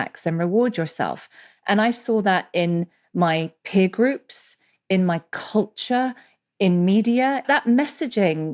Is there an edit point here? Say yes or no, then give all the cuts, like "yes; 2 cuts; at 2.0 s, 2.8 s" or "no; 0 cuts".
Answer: yes; 1 cut; at 7.4 s